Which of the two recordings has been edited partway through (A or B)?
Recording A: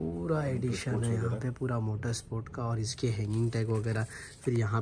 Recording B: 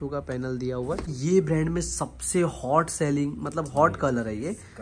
B